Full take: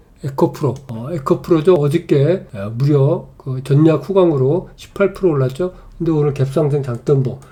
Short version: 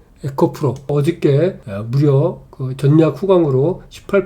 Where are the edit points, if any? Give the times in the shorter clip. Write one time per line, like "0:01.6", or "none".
0:00.9